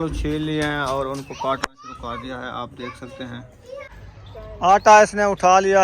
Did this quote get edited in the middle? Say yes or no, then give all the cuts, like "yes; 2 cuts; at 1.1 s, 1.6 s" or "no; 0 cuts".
yes; 1 cut; at 3.9 s